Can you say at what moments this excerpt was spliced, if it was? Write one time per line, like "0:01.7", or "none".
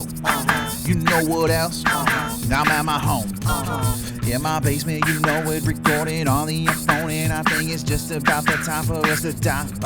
0:01.9